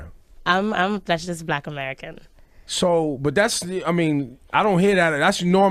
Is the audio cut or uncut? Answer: cut